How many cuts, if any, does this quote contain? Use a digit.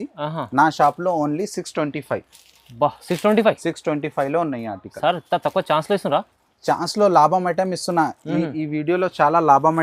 0